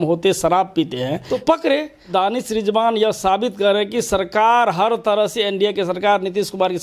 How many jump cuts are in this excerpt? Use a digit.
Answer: 2